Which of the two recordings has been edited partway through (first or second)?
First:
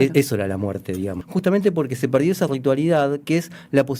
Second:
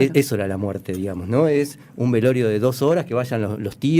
first